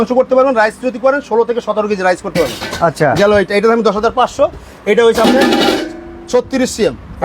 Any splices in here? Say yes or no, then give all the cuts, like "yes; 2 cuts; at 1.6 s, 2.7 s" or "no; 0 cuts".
no; 0 cuts